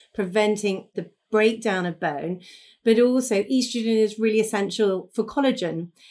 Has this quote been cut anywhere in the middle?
yes; 1 cut; at 0.9 s

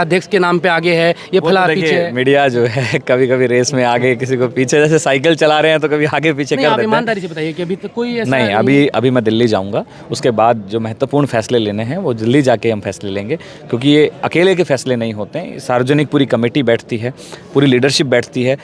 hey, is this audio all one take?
yes; 0 cuts

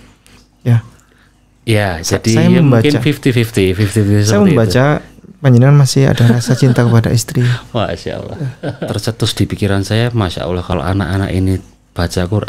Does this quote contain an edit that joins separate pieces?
yes; 2 cuts; at 8.8 s, 10.7 s

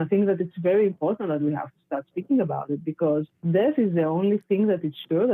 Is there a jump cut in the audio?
no; 0 cuts

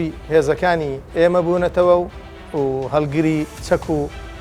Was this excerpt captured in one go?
no; 2 cuts; at 2.4 s, 3.6 s

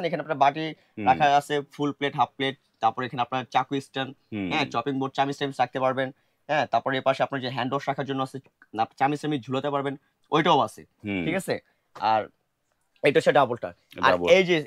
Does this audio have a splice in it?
no; 0 cuts

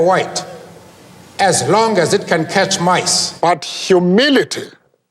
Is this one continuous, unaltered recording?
no; 1 cut; at 3.2 s

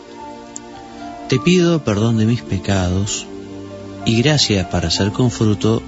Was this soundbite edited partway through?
yes; 1 cut; at 3.0 s

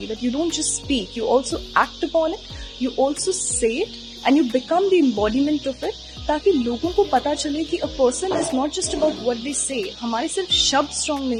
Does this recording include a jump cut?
no; 0 cuts

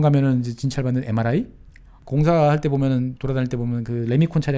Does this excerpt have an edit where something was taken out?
yes; 1 cut; at 2.0 s

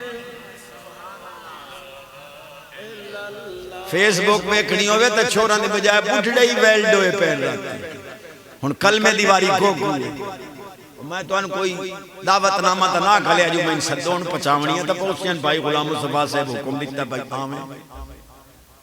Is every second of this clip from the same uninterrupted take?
yes; 0 cuts

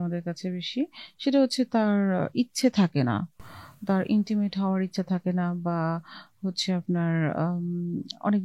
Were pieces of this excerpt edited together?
no; 0 cuts

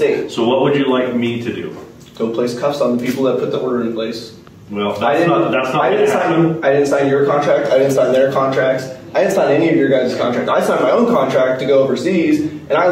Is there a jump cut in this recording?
no; 0 cuts

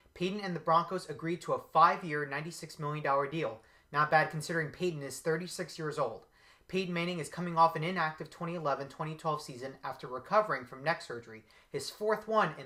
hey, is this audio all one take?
yes; 0 cuts

